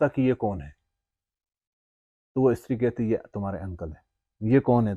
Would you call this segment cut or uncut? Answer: uncut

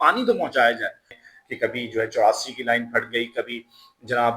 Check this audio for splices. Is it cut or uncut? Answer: cut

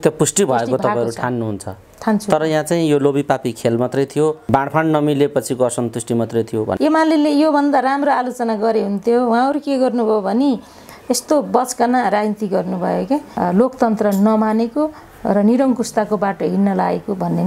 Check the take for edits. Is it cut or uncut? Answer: cut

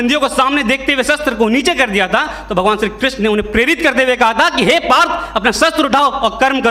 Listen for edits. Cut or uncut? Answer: uncut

